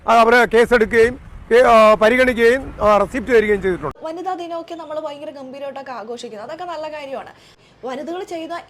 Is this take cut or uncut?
uncut